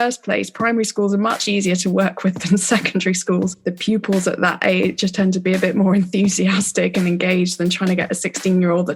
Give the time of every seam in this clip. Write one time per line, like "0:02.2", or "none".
0:03.6

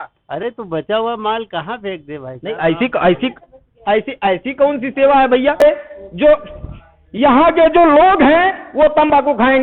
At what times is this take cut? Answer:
0:05.6

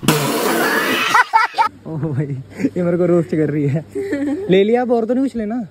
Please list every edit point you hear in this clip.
none

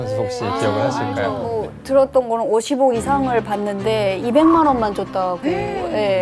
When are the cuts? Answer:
0:01.5

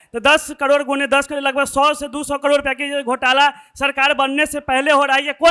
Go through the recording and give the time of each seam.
none

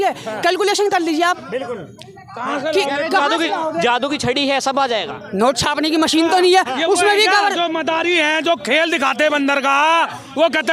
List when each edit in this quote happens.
none

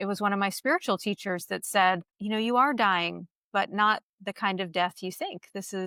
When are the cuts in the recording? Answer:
none

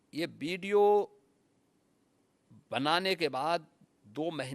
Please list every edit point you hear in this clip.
none

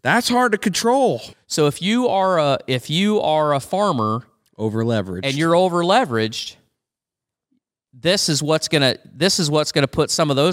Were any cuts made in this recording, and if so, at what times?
0:01.3

